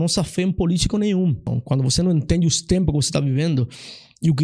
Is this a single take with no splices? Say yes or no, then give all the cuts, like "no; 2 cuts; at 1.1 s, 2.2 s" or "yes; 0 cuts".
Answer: no; 1 cut; at 1.5 s